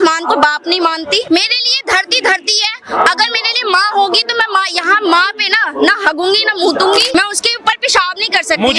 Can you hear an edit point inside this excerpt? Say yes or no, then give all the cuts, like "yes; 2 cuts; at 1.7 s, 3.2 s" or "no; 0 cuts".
yes; 2 cuts; at 1.2 s, 7.1 s